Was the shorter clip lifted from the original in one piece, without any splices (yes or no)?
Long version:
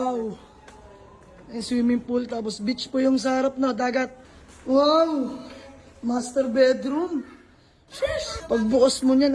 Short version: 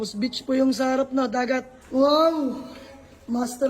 no